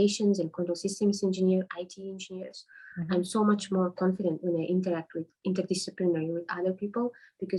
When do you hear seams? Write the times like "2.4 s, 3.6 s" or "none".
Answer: none